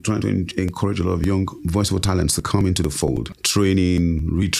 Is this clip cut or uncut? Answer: cut